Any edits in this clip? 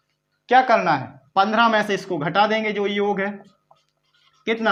no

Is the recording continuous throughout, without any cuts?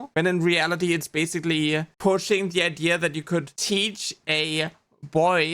no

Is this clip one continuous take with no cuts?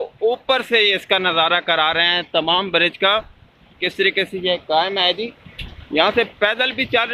yes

